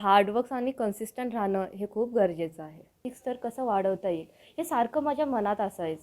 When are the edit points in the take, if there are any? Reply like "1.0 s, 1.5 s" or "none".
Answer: 3.0 s